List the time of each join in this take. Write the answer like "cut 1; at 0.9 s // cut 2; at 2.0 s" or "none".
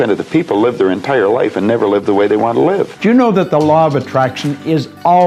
cut 1; at 2.9 s